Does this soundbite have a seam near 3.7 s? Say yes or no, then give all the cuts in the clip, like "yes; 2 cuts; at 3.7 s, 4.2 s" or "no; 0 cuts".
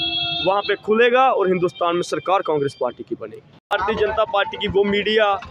yes; 1 cut; at 3.7 s